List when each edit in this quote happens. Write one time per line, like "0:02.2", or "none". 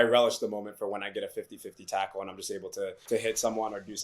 0:03.0